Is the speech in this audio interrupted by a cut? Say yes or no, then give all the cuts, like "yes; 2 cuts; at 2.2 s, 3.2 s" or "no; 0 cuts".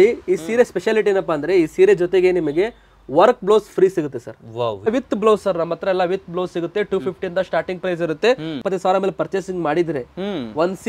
yes; 2 cuts; at 4.9 s, 8.6 s